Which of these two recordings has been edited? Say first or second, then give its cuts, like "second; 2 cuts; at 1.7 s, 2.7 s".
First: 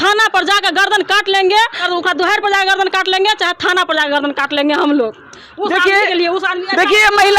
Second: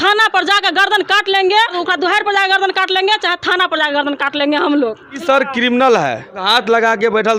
second; 3 cuts; at 1.7 s, 5.2 s, 6.4 s